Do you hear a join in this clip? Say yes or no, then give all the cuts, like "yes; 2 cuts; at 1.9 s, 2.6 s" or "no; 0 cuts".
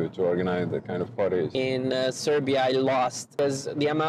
yes; 2 cuts; at 1.5 s, 3.3 s